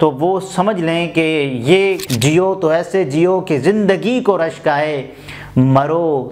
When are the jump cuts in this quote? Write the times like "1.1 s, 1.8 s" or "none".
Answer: 2.0 s